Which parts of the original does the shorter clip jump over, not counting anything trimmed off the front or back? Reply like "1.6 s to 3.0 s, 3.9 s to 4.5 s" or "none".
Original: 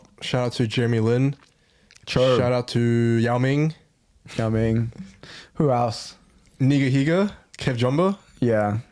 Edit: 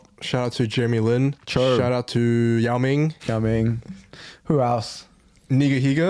1.4 s to 2.0 s, 3.8 s to 4.3 s